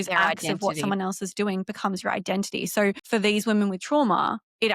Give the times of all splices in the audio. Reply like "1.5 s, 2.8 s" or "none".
3.0 s